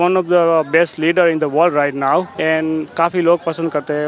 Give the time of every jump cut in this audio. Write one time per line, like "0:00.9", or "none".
0:02.3